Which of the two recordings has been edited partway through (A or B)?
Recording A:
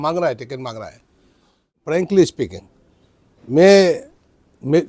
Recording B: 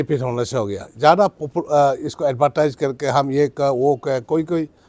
A